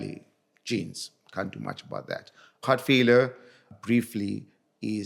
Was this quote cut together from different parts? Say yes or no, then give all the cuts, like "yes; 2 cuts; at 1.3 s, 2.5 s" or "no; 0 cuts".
yes; 2 cuts; at 2.6 s, 3.7 s